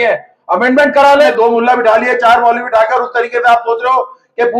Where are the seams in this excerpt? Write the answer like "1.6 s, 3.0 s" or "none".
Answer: 1.3 s